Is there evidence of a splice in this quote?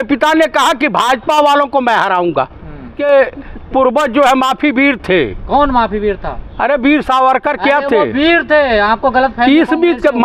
yes; 1 cut; at 3.0 s

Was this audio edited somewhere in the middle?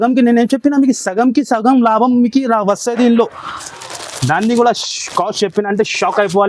yes; 1 cut; at 3.7 s

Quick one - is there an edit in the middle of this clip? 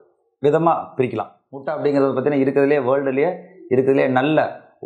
yes; 1 cut; at 1.6 s

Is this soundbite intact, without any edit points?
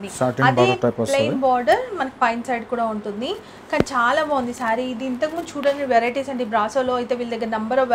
yes; 0 cuts

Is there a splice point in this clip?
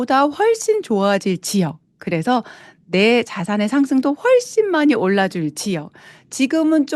no; 0 cuts

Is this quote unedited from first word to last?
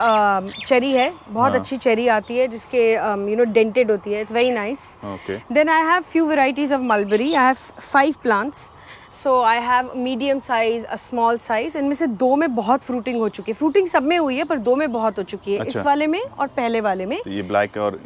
yes; 0 cuts

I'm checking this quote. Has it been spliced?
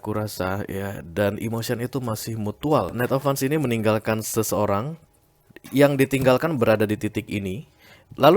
yes; 1 cut; at 2.9 s

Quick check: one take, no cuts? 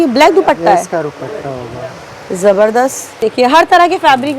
no; 1 cut; at 3.2 s

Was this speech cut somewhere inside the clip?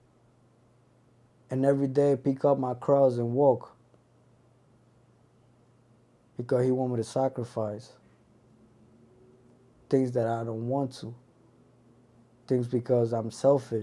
no; 0 cuts

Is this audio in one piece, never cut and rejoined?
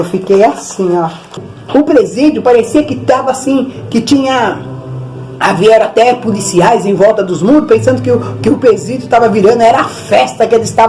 no; 1 cut; at 1.5 s

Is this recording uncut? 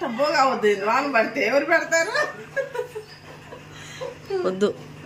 yes; 0 cuts

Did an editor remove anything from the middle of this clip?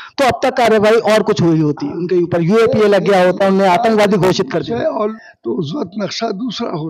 yes; 1 cut; at 5.1 s

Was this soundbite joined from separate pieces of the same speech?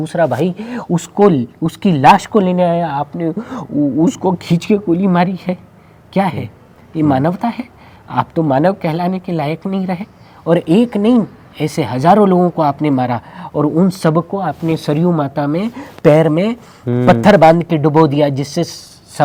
no; 0 cuts

